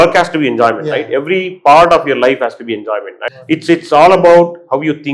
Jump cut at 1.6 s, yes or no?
no